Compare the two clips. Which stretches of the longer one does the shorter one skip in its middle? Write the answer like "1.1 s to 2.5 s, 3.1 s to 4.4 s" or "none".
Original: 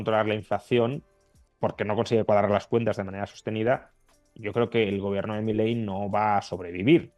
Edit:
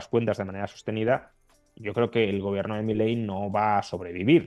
none